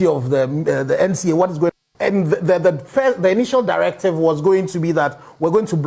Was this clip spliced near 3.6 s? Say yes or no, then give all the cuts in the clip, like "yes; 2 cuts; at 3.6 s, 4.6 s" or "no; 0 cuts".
no; 1 cut; at 1.5 s